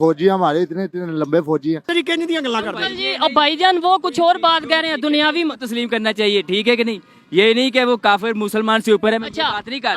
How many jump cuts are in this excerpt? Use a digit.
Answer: 1